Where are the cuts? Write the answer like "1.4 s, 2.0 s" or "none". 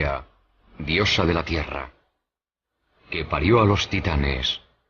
3.4 s